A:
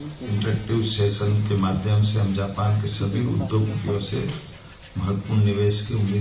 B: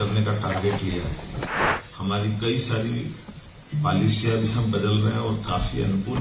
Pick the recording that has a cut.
B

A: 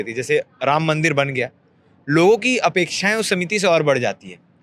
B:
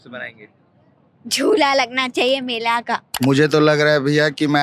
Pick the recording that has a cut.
B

